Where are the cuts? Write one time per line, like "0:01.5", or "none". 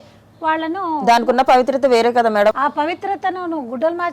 0:02.5